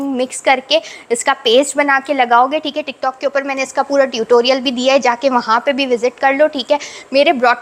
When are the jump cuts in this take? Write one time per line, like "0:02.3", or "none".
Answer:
none